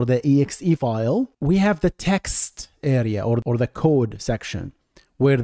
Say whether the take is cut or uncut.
cut